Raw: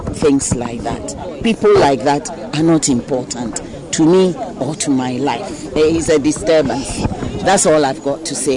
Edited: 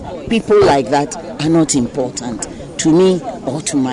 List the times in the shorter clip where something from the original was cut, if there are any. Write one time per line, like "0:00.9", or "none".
none